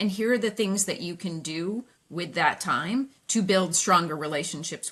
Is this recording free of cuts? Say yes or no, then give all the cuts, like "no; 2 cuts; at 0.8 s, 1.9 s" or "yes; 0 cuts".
yes; 0 cuts